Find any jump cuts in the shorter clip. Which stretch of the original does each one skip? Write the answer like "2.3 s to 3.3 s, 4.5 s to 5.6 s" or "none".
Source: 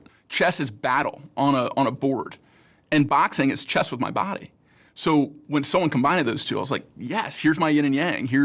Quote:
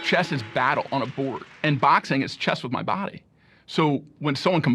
1.3 s to 2.3 s